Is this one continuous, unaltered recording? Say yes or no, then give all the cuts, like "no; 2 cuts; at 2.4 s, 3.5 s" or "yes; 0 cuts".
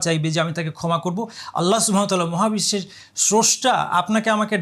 yes; 0 cuts